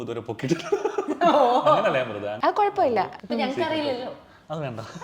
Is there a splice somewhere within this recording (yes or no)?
yes